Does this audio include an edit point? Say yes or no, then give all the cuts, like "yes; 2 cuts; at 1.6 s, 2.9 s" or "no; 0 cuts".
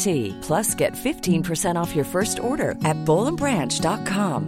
no; 0 cuts